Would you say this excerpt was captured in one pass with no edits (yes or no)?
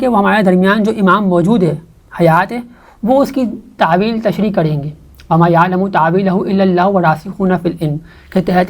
yes